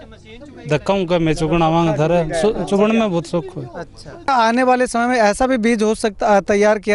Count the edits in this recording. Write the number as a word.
one